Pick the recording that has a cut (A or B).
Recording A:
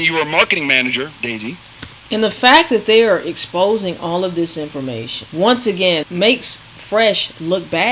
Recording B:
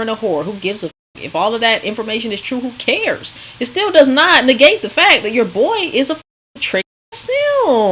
A